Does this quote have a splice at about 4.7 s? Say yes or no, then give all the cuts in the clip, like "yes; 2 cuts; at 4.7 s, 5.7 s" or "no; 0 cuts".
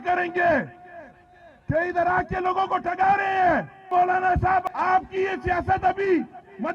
yes; 2 cuts; at 3.9 s, 4.7 s